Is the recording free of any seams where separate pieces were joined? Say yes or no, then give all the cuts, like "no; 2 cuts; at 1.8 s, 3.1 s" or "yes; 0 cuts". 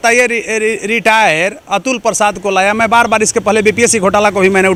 yes; 0 cuts